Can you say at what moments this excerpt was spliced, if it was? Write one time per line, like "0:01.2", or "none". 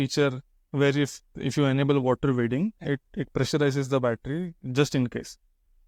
none